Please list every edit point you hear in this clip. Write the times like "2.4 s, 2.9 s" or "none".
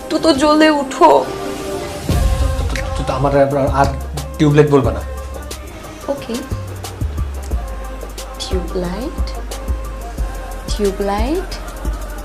5.1 s